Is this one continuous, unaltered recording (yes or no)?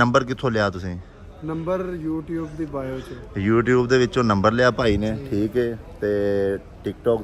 yes